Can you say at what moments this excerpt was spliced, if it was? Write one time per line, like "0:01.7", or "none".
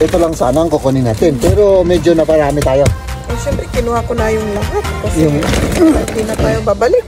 none